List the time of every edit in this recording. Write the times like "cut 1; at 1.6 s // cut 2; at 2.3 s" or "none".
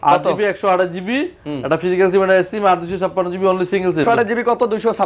cut 1; at 4.0 s